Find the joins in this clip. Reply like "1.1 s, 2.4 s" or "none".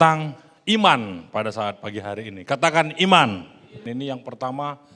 3.8 s